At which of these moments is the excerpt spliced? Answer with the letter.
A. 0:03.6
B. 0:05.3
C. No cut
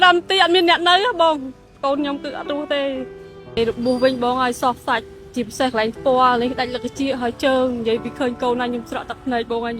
A